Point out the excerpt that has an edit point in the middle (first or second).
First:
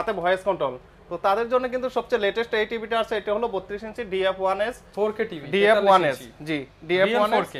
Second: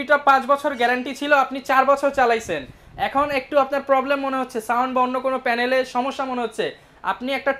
first